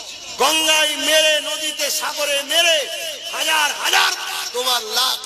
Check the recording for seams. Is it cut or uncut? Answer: uncut